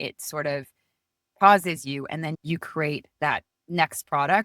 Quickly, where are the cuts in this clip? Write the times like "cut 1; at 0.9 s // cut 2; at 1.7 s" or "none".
cut 1; at 2.4 s